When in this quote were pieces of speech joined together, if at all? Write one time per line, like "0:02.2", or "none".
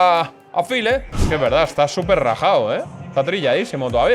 0:01.1